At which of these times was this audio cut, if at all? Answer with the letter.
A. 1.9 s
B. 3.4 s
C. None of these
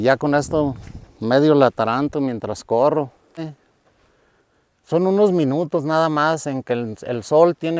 B